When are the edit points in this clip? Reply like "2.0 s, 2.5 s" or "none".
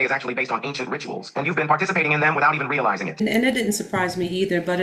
3.2 s